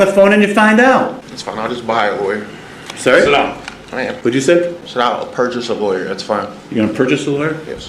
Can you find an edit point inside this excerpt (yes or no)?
yes